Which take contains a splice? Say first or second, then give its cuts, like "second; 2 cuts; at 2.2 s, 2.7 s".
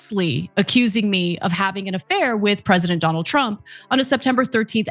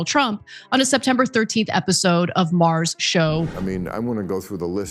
second; 1 cut; at 3.5 s